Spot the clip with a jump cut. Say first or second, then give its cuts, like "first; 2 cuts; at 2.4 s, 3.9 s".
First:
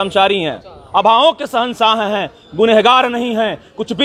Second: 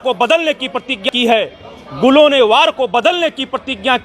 second; 1 cut; at 1.1 s